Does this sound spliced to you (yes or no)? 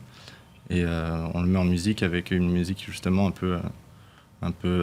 no